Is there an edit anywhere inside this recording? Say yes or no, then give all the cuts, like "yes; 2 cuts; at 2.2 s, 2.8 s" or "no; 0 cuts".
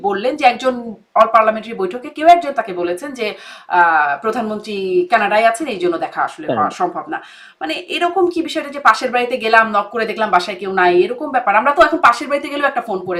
no; 0 cuts